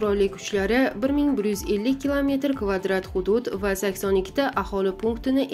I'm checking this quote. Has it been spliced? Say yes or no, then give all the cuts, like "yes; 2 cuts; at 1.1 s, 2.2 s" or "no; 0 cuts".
no; 0 cuts